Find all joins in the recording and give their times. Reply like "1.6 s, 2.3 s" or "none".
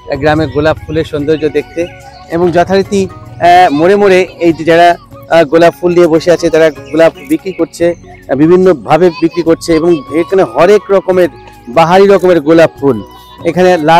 none